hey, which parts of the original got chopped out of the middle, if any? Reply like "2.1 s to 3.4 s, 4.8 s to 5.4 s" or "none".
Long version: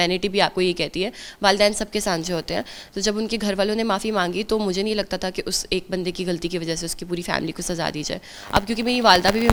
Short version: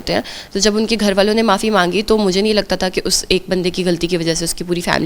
none